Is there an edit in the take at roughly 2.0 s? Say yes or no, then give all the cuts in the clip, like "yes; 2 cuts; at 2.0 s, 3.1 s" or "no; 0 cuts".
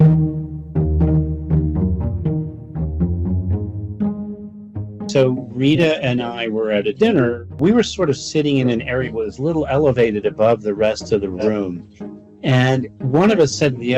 no; 1 cut; at 5.5 s